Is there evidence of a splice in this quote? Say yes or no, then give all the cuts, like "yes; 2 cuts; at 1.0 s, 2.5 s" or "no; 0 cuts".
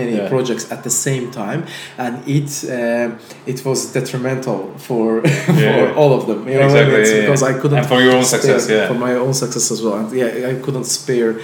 no; 0 cuts